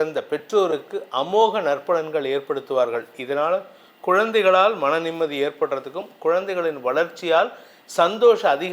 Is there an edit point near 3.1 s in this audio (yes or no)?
no